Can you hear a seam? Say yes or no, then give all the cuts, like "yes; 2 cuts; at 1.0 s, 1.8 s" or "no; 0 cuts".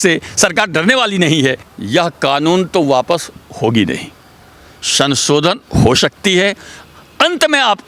yes; 1 cut; at 1.7 s